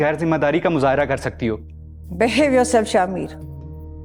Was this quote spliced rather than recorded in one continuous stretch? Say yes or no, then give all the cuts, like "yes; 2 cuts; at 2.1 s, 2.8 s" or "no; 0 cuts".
no; 0 cuts